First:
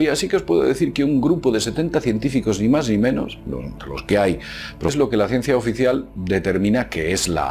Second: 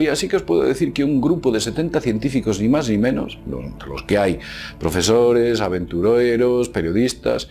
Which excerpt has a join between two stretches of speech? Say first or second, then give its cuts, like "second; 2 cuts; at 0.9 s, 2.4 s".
second; 1 cut; at 4.9 s